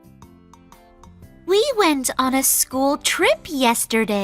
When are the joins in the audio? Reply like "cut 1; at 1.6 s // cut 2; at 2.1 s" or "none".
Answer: cut 1; at 1.4 s